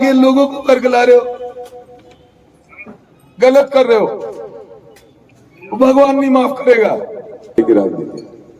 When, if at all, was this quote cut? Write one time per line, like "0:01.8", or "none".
0:07.6